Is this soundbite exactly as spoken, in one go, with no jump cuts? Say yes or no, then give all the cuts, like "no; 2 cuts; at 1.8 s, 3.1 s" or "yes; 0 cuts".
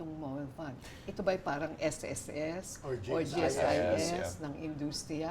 yes; 0 cuts